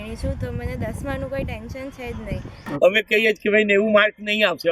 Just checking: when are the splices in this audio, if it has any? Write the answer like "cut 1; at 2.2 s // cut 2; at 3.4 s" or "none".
cut 1; at 2.5 s